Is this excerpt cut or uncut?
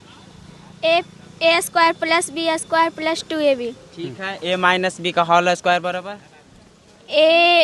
uncut